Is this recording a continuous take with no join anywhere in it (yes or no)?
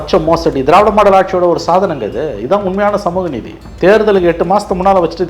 no